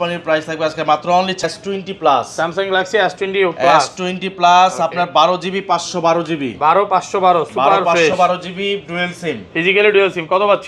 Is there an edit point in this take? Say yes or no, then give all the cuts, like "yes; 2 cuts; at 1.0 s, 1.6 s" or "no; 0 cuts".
yes; 1 cut; at 1.4 s